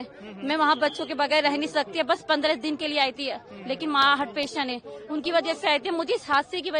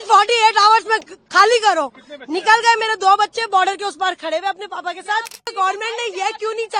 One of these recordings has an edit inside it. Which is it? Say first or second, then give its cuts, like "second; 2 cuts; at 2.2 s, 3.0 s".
second; 1 cut; at 5.5 s